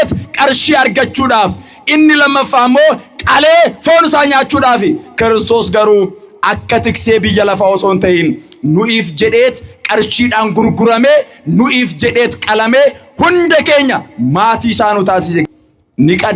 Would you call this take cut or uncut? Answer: cut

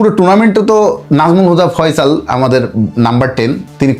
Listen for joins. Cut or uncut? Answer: uncut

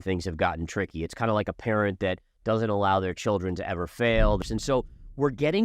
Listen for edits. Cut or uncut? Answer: cut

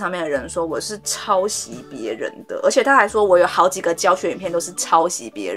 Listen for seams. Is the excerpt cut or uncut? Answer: uncut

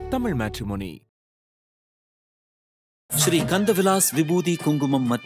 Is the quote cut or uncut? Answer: uncut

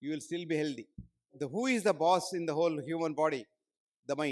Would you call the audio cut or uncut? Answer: cut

